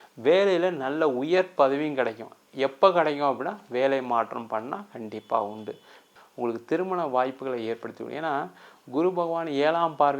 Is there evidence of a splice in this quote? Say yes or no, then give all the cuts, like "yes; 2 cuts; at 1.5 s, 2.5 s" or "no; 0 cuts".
yes; 1 cut; at 6.1 s